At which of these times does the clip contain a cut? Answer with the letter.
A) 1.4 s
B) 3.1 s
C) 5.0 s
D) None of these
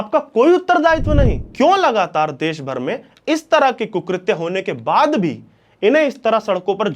A